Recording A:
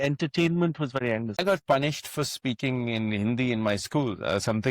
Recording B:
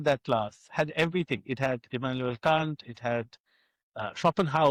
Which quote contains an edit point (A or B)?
A